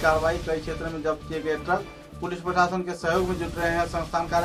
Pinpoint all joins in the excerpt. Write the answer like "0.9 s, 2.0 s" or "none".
none